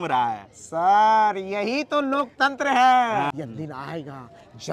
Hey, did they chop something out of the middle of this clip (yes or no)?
yes